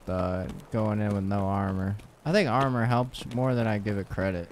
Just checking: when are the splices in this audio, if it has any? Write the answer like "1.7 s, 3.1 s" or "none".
3.2 s